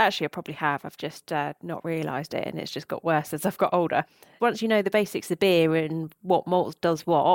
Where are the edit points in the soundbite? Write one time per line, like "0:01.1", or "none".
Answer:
0:04.3